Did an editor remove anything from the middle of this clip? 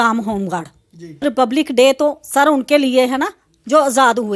yes; 1 cut; at 1.2 s

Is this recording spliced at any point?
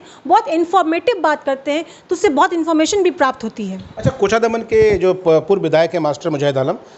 no; 0 cuts

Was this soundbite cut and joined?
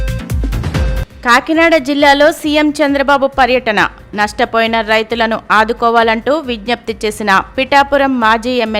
yes; 1 cut; at 1.0 s

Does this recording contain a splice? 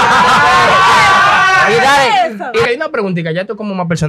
yes; 1 cut; at 2.7 s

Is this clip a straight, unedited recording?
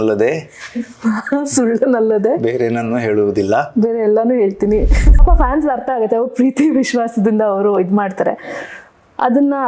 no; 1 cut; at 5.2 s

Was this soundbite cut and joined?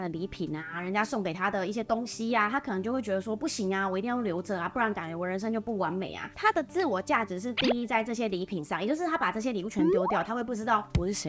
no; 0 cuts

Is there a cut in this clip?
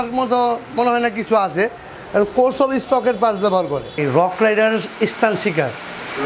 yes; 1 cut; at 4.0 s

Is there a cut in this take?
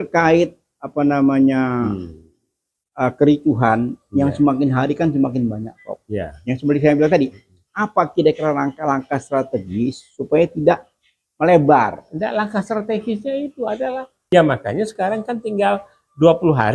yes; 1 cut; at 14.1 s

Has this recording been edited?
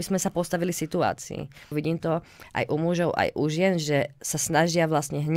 yes; 1 cut; at 1.7 s

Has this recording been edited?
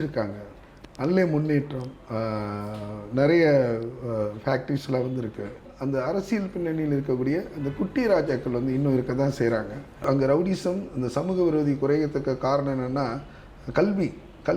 yes; 2 cuts; at 5.7 s, 10.0 s

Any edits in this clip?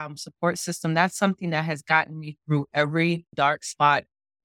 yes; 1 cut; at 3.3 s

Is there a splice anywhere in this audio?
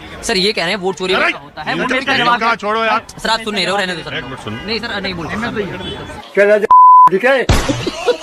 no; 0 cuts

